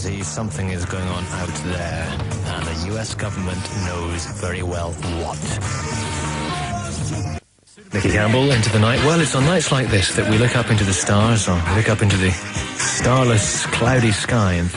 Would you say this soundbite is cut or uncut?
uncut